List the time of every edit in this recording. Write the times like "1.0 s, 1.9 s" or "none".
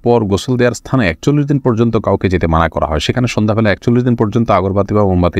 none